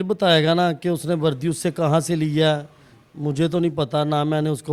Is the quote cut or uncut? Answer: uncut